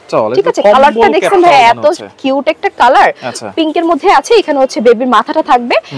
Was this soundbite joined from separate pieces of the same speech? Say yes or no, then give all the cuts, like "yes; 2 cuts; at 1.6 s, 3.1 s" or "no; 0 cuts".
no; 0 cuts